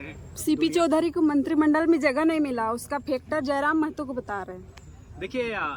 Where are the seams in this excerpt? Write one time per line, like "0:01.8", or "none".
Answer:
none